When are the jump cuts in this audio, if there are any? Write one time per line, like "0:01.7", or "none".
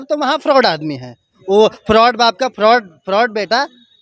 none